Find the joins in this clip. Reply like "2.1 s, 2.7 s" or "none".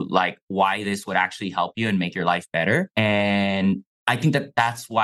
2.9 s